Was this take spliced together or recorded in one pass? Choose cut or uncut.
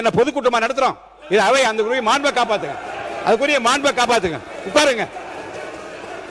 uncut